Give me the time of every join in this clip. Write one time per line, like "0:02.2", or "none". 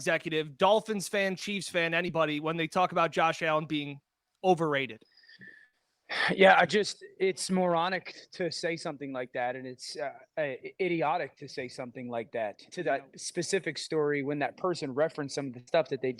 0:12.6